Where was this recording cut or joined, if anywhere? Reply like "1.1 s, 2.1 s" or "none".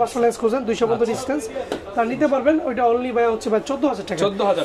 none

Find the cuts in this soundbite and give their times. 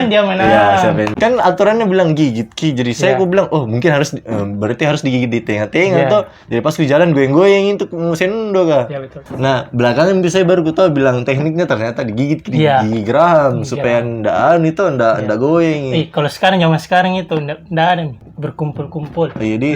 1.1 s, 9.3 s, 18.2 s

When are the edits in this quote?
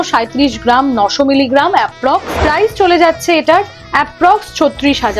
2.4 s

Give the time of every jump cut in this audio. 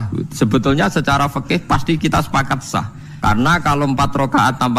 3.0 s

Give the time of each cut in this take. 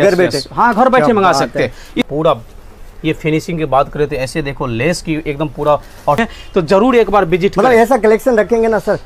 2.0 s, 6.2 s

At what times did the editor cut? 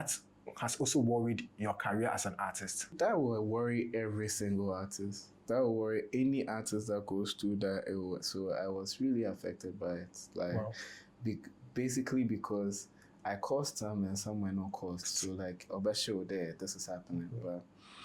2.9 s

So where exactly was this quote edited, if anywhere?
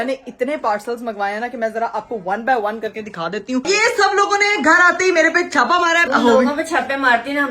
3.7 s, 6.0 s

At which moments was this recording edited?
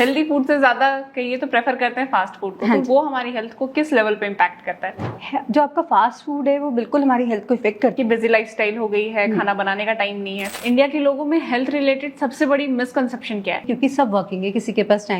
7.9 s, 10.5 s, 13.7 s

